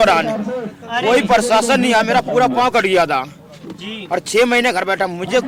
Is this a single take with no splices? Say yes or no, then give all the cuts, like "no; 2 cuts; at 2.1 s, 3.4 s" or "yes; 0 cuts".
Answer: yes; 0 cuts